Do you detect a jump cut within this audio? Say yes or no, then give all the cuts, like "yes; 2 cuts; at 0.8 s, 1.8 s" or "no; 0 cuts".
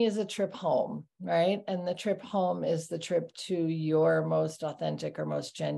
no; 0 cuts